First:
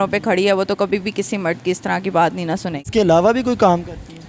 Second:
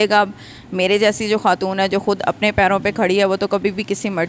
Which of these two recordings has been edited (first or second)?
first